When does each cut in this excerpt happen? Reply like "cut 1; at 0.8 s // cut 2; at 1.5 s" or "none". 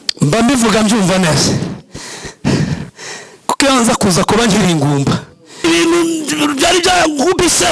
cut 1; at 5.6 s

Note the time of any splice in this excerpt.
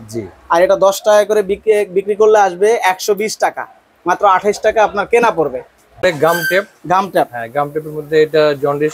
cut 1; at 6.0 s

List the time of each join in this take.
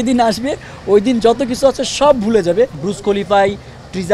cut 1; at 2.8 s

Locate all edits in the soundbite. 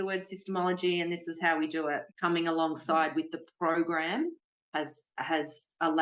cut 1; at 2.1 s

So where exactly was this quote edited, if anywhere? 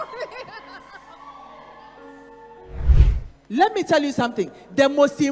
cut 1; at 2.9 s

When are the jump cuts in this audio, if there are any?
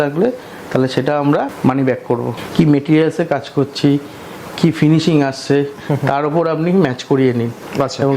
cut 1; at 1.5 s // cut 2; at 2.4 s

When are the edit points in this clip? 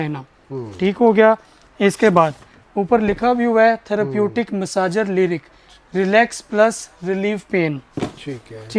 none

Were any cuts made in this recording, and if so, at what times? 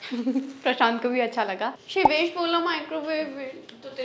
cut 1; at 1.7 s

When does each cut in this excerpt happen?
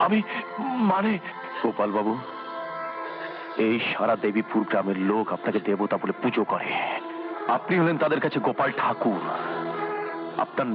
none

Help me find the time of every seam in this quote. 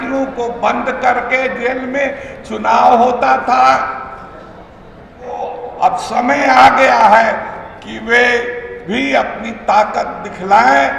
cut 1; at 5.4 s

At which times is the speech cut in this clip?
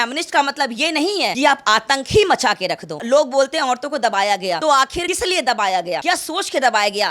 cut 1; at 3.0 s

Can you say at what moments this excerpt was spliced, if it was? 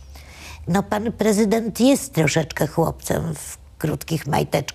none

